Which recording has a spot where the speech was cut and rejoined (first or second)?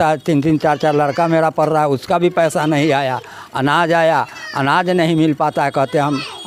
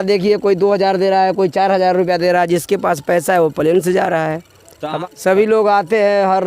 second